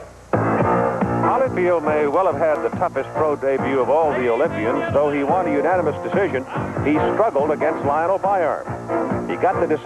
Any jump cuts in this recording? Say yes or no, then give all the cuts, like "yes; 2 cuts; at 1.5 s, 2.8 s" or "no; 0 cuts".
no; 0 cuts